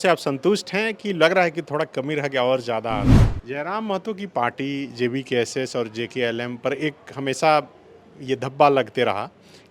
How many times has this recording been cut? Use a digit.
1